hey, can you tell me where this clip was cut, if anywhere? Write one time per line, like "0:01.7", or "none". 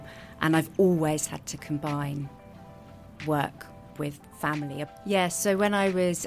0:04.9